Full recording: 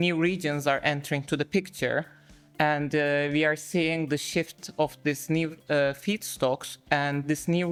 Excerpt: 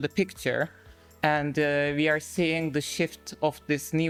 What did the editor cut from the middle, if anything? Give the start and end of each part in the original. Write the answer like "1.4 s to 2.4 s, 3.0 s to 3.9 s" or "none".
none